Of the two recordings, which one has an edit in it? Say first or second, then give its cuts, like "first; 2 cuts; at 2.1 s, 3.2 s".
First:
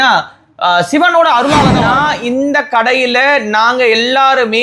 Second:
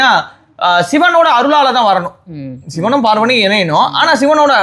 first; 1 cut; at 1.8 s